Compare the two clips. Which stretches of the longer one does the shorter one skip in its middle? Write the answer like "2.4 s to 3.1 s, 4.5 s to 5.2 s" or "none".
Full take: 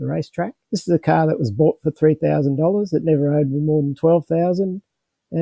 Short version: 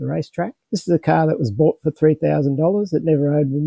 none